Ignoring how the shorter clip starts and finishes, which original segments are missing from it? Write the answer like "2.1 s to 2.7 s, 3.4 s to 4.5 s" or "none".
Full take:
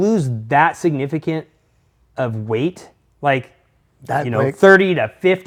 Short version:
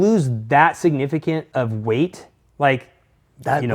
1.5 s to 2.1 s